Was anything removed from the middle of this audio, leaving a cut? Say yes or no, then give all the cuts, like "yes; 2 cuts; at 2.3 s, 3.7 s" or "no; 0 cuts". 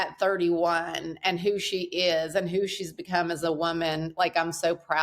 no; 0 cuts